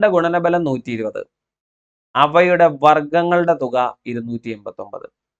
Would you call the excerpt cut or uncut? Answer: uncut